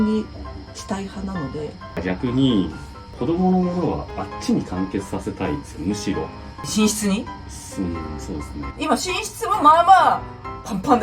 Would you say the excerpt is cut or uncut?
cut